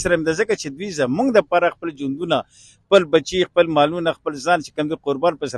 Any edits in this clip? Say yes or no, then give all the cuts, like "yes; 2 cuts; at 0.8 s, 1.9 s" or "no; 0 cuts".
no; 0 cuts